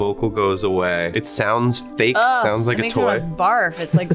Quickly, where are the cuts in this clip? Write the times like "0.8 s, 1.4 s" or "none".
1.2 s